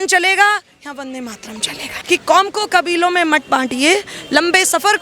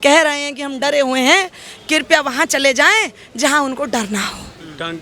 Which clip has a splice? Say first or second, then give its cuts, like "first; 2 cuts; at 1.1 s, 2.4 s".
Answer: first; 1 cut; at 1.9 s